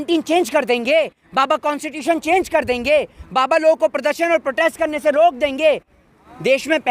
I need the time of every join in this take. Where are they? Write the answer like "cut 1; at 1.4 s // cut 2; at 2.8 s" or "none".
none